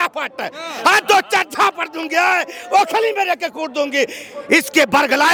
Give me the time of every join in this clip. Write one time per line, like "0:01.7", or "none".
none